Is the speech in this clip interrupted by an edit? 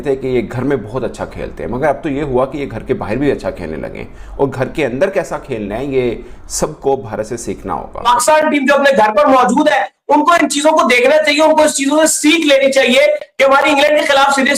yes; 1 cut; at 8.0 s

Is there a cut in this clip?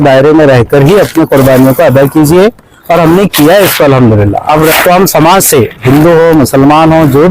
yes; 1 cut; at 4.7 s

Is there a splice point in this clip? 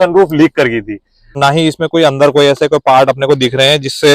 yes; 1 cut; at 1.4 s

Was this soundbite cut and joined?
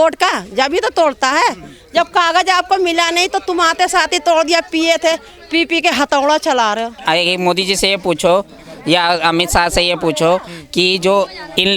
yes; 1 cut; at 7.0 s

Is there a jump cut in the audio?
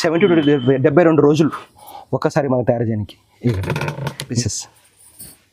yes; 1 cut; at 4.4 s

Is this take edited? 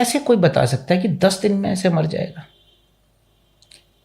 no; 0 cuts

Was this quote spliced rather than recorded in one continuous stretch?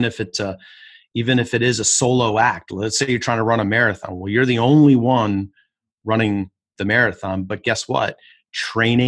no; 0 cuts

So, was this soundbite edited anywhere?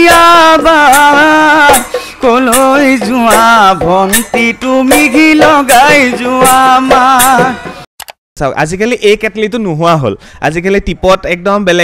yes; 1 cut; at 8.3 s

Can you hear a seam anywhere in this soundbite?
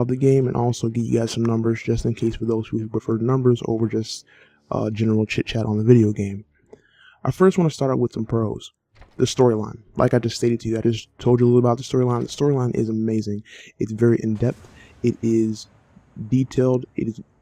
no; 0 cuts

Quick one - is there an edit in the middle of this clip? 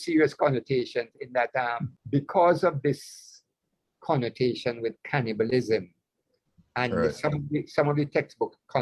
yes; 1 cut; at 1.9 s

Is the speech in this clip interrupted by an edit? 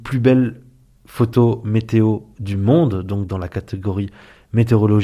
no; 0 cuts

